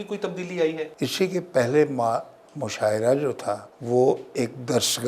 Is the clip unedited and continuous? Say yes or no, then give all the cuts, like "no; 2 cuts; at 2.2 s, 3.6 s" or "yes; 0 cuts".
no; 2 cuts; at 0.9 s, 3.7 s